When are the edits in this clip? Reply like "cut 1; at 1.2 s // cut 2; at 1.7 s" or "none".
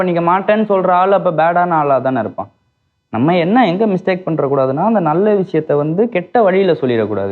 none